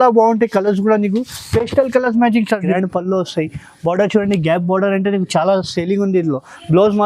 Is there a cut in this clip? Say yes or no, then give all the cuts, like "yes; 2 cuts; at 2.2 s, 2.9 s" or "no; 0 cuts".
yes; 1 cut; at 2.7 s